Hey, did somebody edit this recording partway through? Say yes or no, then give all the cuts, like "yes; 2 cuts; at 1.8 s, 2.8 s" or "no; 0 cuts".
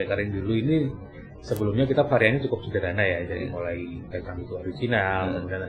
no; 0 cuts